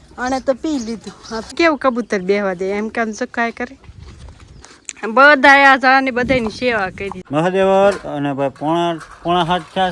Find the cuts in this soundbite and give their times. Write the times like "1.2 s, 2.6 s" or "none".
1.5 s, 7.1 s